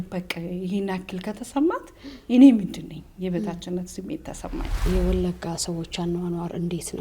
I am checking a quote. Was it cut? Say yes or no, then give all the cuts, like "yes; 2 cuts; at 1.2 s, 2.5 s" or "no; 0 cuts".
yes; 1 cut; at 4.8 s